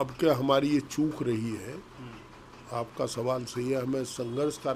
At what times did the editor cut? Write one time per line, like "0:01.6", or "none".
none

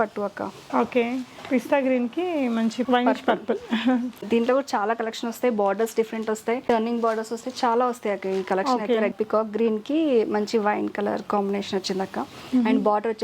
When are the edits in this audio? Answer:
0:02.8
0:04.2
0:06.6
0:09.1

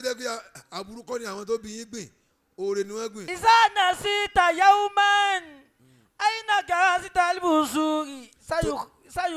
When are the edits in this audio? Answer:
0:03.2

